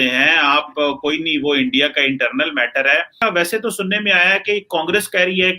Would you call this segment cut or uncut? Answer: cut